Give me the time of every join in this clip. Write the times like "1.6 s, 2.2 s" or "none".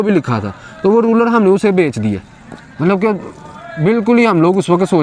none

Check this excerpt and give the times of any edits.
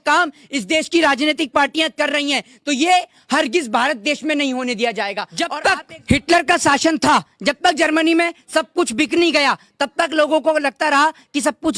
5.3 s

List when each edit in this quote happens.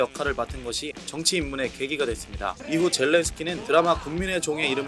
1.0 s, 2.6 s, 3.6 s

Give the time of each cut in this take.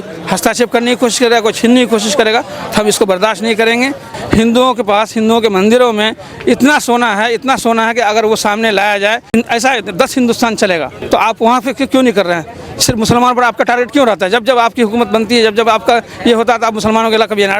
4.1 s, 9.3 s, 10.9 s

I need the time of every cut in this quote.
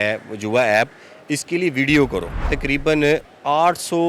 2.4 s

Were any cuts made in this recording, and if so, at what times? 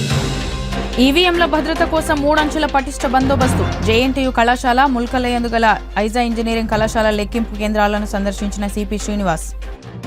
0.9 s

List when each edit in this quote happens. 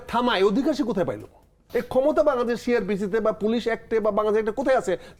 none

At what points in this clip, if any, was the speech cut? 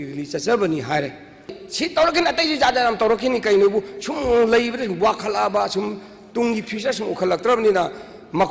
1.6 s

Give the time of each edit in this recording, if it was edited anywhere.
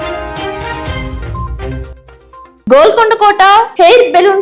2.4 s

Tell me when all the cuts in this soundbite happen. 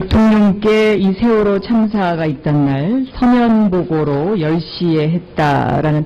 1.2 s

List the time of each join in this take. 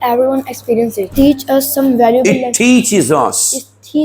1.1 s

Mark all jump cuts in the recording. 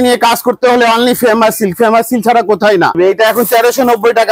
3.0 s

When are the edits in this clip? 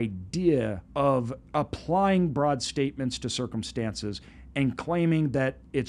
0.8 s, 1.4 s

